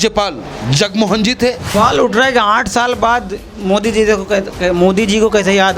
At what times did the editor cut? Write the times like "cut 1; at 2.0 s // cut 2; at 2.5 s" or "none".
cut 1; at 1.7 s